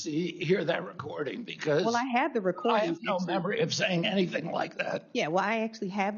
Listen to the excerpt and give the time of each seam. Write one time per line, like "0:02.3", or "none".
none